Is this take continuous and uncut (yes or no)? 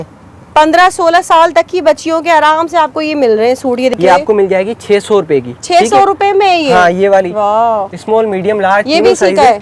no